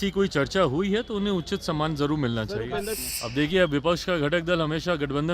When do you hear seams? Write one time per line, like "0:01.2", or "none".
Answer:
0:03.0